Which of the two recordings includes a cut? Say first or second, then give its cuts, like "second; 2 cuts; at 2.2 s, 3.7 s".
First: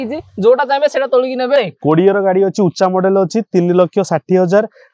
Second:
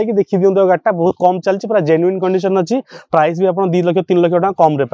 first; 1 cut; at 1.6 s